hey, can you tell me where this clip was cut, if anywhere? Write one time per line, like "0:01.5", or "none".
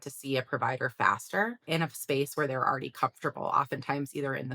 0:01.6